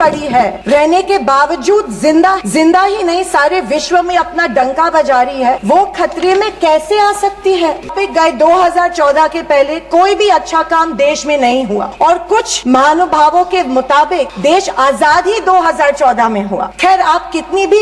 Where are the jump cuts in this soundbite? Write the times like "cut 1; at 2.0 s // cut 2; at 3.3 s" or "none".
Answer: cut 1; at 7.9 s

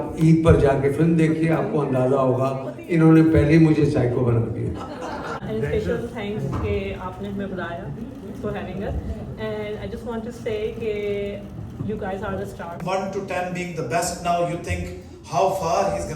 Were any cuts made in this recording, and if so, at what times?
cut 1; at 5.4 s // cut 2; at 12.8 s

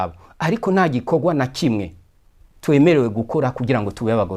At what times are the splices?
none

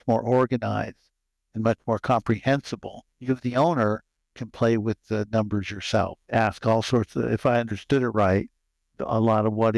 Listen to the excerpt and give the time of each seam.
cut 1; at 3.1 s

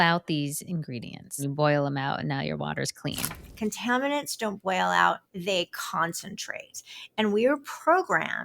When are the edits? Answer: cut 1; at 1.4 s // cut 2; at 3.4 s

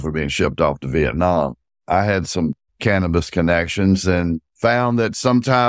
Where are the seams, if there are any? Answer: cut 1; at 1.7 s // cut 2; at 2.7 s // cut 3; at 4.5 s

